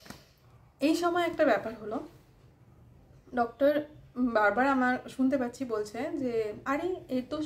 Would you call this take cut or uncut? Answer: uncut